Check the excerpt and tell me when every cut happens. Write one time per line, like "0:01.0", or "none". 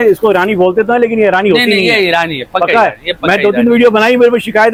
none